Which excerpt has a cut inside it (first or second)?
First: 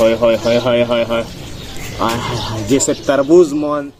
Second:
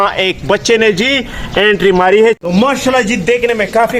second